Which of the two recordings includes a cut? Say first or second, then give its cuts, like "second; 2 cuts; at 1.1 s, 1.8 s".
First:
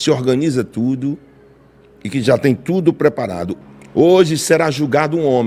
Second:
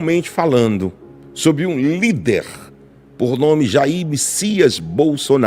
first; 1 cut; at 3.7 s